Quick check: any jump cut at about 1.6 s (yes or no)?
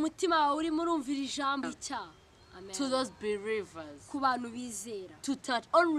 yes